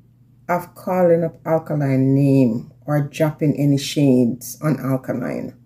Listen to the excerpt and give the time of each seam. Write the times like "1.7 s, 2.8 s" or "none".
none